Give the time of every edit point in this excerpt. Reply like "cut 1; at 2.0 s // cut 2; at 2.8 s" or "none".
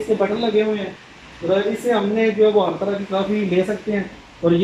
none